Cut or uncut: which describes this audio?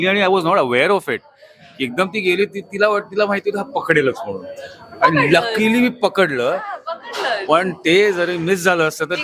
uncut